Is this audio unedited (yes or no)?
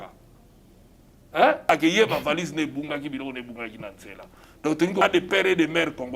no